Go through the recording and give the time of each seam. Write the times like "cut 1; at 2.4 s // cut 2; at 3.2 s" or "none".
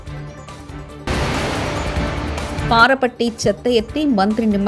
none